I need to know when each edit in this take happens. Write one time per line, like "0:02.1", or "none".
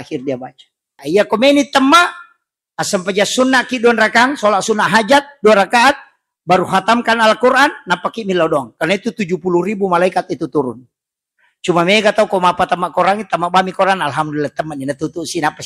0:01.0